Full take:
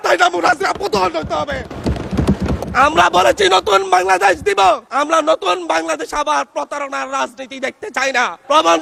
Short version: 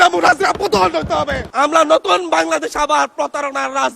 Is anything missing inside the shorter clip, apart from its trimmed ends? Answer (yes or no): yes